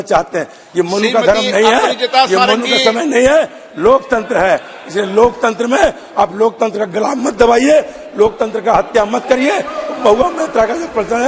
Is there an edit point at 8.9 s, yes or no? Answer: no